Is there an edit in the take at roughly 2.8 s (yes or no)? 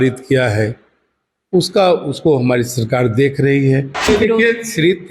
no